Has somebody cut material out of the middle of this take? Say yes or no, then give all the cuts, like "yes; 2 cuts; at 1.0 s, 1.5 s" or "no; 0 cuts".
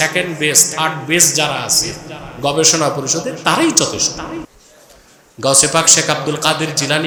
no; 0 cuts